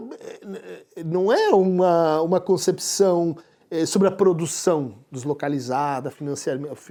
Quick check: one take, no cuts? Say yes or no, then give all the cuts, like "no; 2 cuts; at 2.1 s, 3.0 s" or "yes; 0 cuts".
yes; 0 cuts